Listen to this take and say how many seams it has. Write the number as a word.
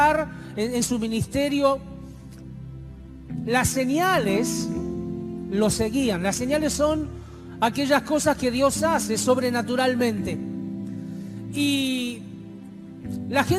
zero